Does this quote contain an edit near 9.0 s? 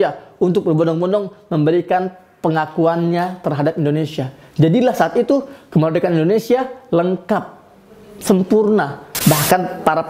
yes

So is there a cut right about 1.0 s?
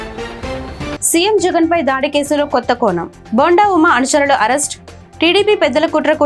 yes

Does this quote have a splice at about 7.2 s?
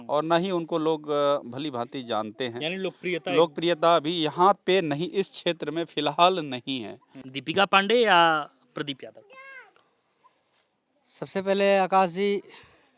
no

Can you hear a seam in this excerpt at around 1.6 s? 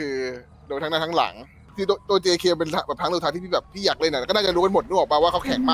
yes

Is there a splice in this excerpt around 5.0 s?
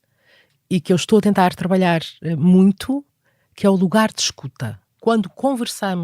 yes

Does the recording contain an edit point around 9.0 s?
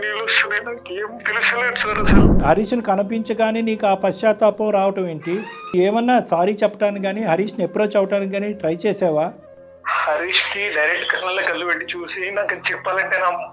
no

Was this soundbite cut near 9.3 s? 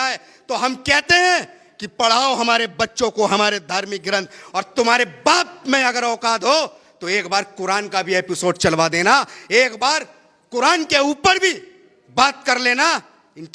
no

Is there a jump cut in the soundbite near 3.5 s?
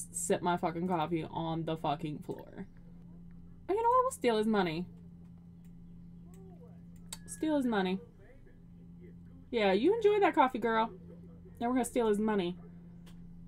yes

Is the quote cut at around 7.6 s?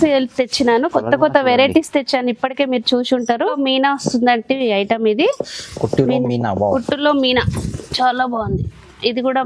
no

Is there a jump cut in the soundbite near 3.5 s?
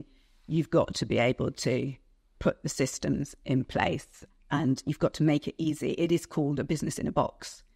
no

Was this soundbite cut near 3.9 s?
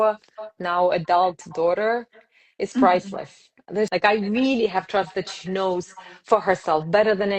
yes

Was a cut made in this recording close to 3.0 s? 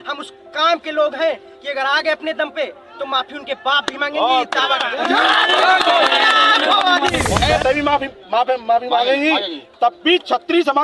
no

